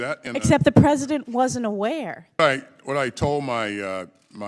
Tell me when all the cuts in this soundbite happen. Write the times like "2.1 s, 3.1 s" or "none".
2.4 s